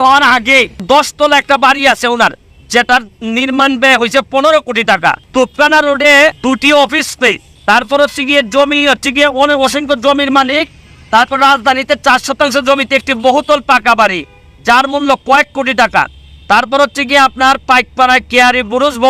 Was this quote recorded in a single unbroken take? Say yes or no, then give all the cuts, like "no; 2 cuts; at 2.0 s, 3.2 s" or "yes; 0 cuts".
no; 4 cuts; at 0.8 s, 5.2 s, 6.4 s, 7.5 s